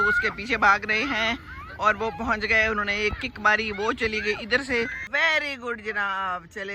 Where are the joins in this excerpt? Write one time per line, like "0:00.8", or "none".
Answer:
0:05.0